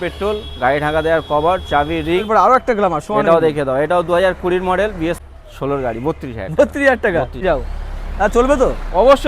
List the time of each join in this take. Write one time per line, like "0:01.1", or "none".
0:02.3
0:05.2
0:07.4

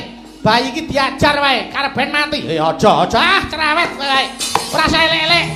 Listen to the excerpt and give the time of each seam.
none

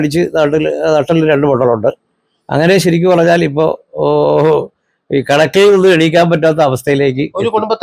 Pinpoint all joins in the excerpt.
none

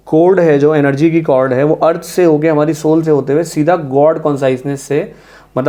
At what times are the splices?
none

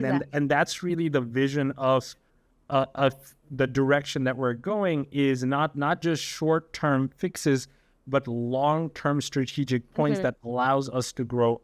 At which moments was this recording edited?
none

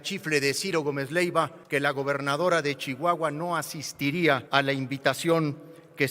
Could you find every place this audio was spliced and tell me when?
0:01.6
0:04.4

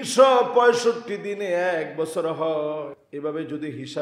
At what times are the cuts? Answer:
0:03.0

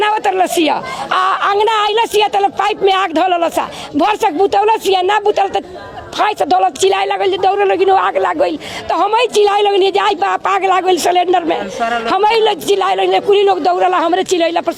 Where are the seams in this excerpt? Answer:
none

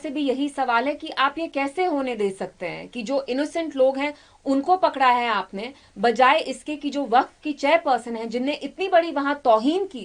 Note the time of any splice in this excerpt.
none

